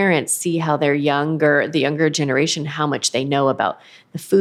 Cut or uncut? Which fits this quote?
uncut